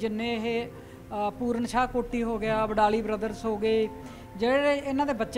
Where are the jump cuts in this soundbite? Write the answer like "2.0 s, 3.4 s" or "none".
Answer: none